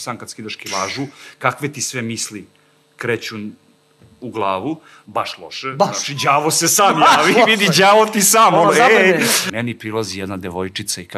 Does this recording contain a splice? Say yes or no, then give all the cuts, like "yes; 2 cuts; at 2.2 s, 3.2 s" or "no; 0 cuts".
yes; 1 cut; at 9.4 s